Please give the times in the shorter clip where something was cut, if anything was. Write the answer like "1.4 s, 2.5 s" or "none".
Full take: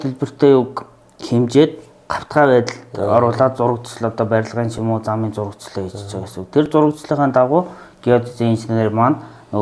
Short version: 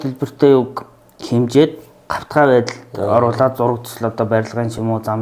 none